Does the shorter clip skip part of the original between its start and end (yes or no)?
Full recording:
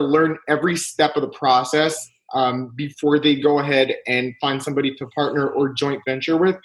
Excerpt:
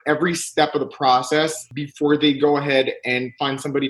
yes